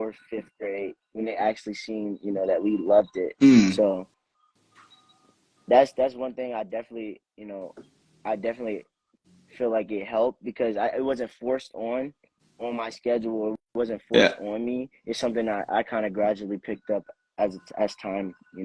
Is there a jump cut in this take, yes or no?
no